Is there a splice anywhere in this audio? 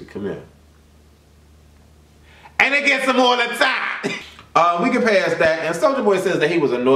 no; 0 cuts

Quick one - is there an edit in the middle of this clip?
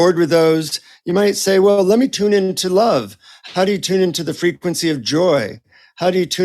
yes; 1 cut; at 2.1 s

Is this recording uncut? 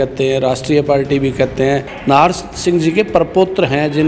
no; 1 cut; at 1.9 s

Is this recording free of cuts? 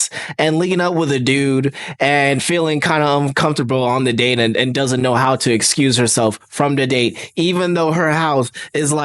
yes; 0 cuts

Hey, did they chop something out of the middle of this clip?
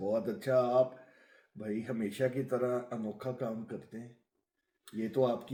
no; 0 cuts

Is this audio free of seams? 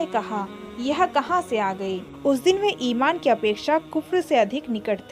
no; 1 cut; at 2.1 s

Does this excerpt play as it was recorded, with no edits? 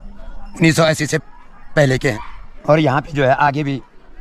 yes; 0 cuts

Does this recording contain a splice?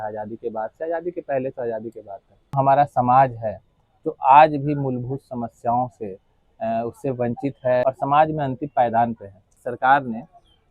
yes; 3 cuts; at 2.5 s, 7.8 s, 9.6 s

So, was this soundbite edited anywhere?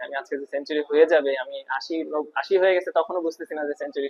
no; 0 cuts

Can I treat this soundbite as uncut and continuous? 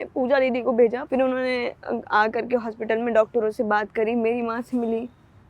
no; 1 cut; at 1.0 s

